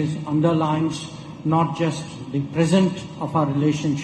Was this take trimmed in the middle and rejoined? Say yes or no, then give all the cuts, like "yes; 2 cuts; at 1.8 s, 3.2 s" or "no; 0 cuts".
no; 0 cuts